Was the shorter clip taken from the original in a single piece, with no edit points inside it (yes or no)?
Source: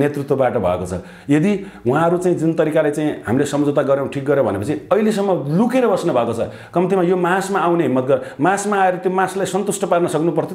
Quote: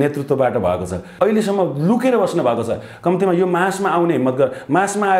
no